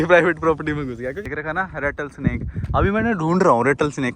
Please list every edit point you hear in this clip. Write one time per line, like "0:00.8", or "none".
0:01.2